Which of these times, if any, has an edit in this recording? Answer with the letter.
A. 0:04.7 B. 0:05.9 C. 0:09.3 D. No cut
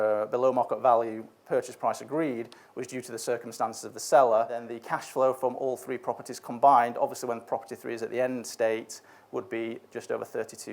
A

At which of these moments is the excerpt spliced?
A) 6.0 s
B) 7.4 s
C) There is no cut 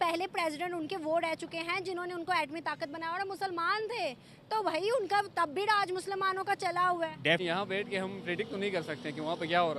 B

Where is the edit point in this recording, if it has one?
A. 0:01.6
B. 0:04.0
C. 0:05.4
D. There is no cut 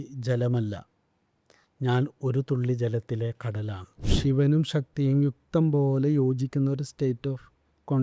B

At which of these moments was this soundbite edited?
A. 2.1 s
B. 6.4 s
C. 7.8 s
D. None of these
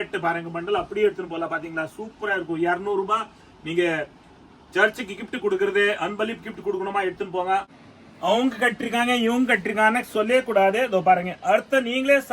C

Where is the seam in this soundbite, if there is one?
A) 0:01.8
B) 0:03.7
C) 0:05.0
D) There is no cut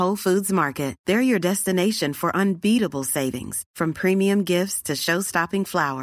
D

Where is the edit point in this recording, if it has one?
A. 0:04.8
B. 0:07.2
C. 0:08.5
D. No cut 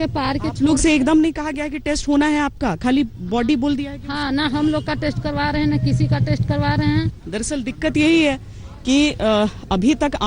B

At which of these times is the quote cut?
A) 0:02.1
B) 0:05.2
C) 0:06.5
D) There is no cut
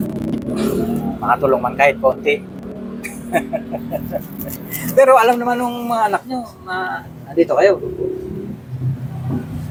D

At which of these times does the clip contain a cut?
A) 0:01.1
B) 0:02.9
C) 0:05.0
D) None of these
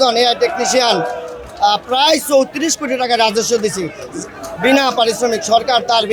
D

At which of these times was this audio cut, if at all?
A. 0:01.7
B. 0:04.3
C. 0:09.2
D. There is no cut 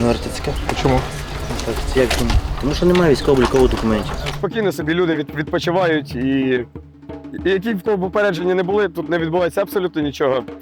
B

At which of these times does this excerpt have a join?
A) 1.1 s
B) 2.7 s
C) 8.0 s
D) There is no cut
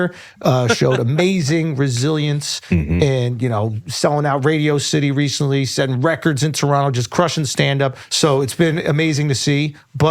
C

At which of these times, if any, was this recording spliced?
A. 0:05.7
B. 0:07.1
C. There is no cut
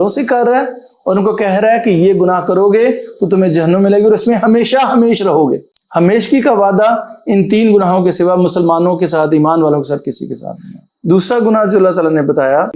C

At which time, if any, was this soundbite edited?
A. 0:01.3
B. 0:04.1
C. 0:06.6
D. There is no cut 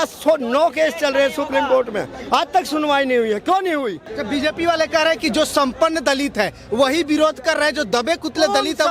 B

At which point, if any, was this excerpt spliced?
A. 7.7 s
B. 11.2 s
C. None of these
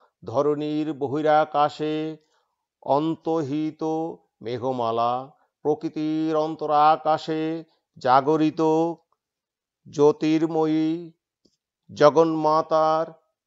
C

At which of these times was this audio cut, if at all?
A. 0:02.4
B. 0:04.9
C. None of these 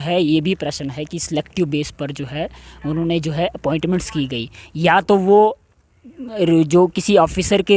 C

